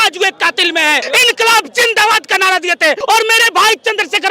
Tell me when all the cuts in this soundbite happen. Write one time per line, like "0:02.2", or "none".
0:01.0
0:03.0